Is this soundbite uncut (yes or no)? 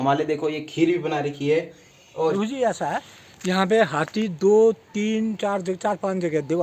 no